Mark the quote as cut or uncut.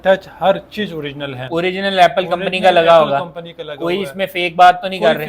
uncut